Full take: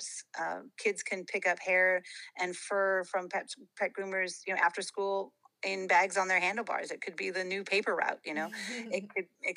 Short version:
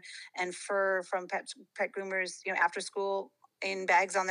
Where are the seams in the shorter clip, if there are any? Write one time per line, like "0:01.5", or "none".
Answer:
none